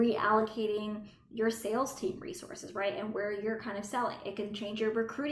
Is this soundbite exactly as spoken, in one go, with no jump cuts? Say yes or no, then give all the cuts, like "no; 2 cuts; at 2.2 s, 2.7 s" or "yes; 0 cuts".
yes; 0 cuts